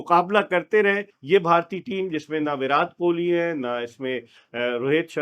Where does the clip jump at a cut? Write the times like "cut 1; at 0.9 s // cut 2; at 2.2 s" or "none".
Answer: cut 1; at 1.1 s